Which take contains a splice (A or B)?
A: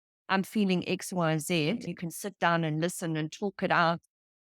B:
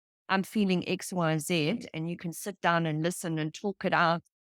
A